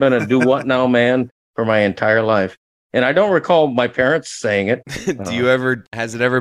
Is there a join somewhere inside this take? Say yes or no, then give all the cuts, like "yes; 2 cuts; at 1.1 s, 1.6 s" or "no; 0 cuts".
no; 0 cuts